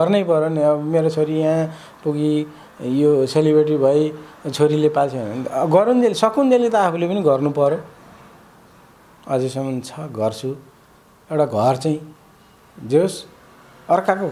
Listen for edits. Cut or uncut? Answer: uncut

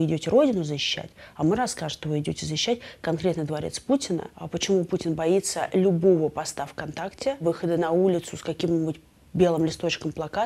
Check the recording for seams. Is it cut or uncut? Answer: cut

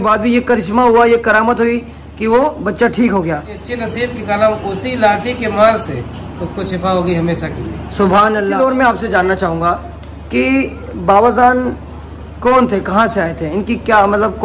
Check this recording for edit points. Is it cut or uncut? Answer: cut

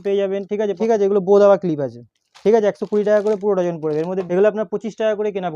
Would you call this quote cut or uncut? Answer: cut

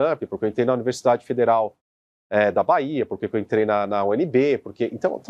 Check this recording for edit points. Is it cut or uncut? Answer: uncut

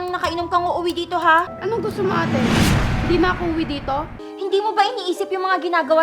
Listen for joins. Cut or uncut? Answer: cut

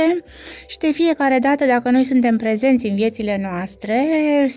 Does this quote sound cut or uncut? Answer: uncut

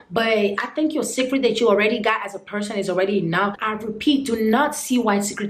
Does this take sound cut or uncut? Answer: cut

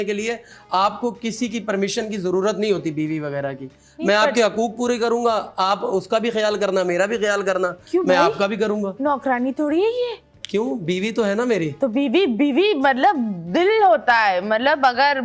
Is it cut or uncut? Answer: uncut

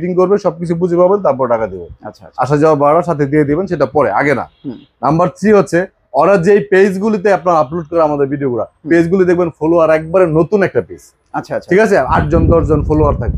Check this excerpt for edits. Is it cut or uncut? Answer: uncut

